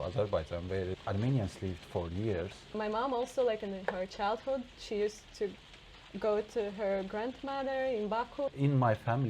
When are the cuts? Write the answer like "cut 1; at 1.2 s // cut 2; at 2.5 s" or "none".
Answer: cut 1; at 1.0 s // cut 2; at 2.7 s // cut 3; at 8.5 s